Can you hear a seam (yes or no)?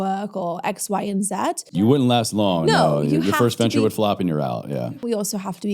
yes